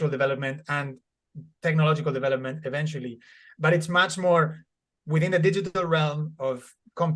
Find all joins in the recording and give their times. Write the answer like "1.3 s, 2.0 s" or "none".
none